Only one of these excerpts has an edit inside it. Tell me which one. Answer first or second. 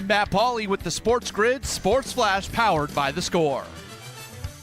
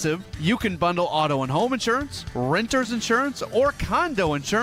first